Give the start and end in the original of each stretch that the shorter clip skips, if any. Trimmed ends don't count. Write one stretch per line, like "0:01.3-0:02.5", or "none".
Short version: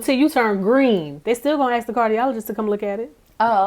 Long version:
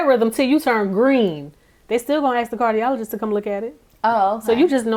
0:01.4-0:01.8